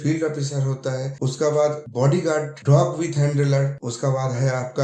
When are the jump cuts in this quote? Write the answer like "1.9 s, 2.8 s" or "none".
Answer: 1.1 s, 2.1 s, 3.8 s